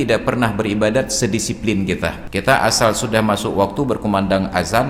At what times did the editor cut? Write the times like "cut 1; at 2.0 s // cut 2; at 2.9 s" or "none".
cut 1; at 2.2 s